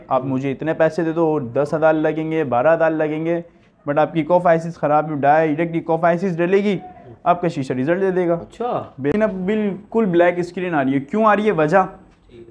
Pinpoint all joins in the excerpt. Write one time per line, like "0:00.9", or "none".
0:09.1